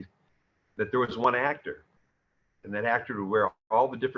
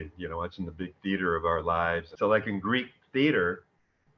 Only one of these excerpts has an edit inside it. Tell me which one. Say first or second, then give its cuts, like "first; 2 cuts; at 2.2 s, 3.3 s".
second; 1 cut; at 2.0 s